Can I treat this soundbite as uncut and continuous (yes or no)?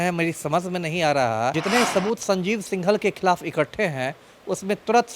no